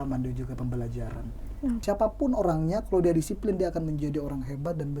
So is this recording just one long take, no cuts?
no; 1 cut; at 1.8 s

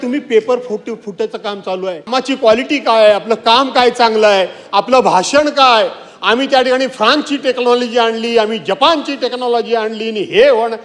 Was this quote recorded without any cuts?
no; 1 cut; at 2.2 s

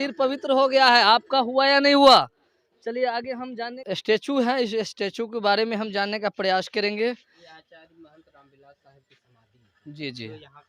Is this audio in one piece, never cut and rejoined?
yes; 0 cuts

